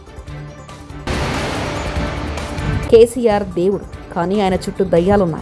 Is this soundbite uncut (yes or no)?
no